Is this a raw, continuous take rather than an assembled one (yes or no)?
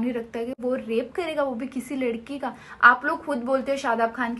yes